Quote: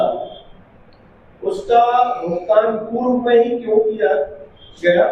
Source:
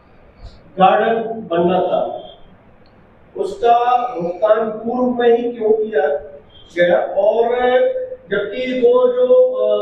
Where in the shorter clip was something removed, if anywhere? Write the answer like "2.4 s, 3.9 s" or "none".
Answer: none